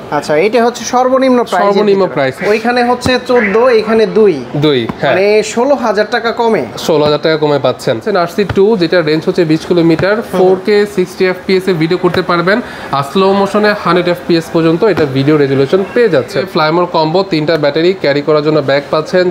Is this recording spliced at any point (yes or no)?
yes